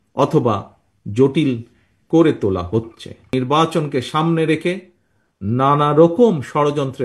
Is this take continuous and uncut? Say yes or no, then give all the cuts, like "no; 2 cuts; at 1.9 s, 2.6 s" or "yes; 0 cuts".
no; 1 cut; at 3.3 s